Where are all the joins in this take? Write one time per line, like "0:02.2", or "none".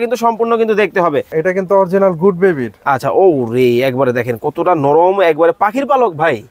0:01.3

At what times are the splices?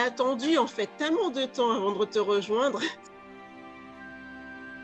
0:03.0

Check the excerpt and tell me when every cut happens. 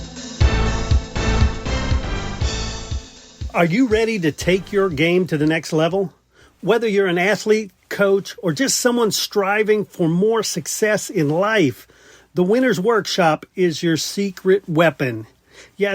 0:02.9

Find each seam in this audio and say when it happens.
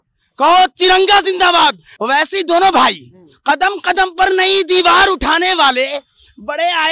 0:01.9

